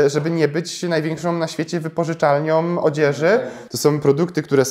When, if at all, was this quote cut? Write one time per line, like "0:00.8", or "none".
0:03.6